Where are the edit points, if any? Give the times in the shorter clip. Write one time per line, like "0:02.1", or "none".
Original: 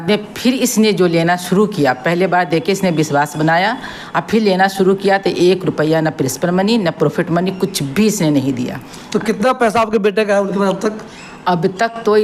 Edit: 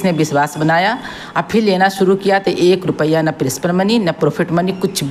none